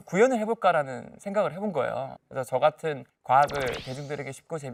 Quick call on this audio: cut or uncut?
uncut